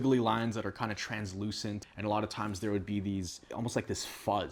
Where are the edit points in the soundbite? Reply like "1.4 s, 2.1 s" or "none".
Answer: none